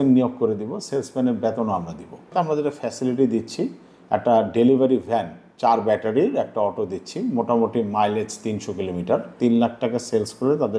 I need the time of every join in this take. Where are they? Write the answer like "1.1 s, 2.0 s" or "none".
2.3 s, 9.6 s